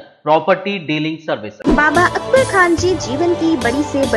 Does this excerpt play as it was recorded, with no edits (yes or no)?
no